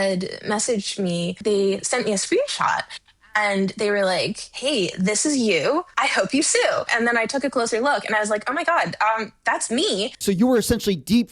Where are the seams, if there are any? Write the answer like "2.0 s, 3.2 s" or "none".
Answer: 1.4 s, 5.9 s, 6.9 s, 10.2 s